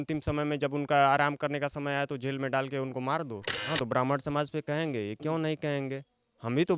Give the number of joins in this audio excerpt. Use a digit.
1